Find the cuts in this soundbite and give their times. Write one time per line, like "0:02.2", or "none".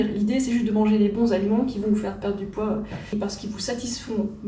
0:03.0

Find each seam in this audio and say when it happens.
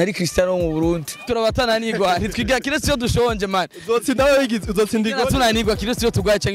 0:01.1

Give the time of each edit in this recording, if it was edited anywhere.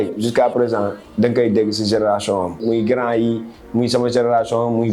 0:02.6

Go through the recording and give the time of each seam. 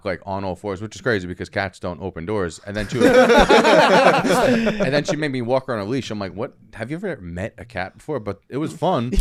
none

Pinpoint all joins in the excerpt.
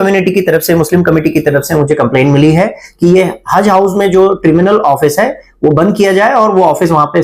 none

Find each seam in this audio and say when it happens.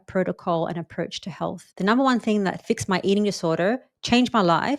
0:01.6
0:02.6

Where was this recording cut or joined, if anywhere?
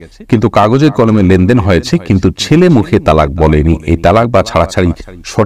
none

